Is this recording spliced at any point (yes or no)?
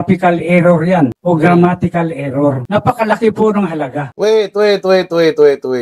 yes